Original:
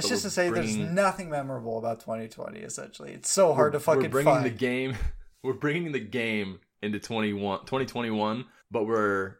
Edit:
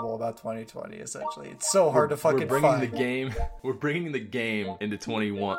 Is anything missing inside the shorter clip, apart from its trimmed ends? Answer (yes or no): yes